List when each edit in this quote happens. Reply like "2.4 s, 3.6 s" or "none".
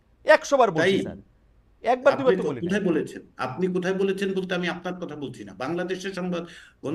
none